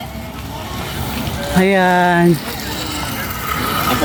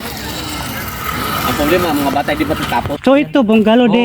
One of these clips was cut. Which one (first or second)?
second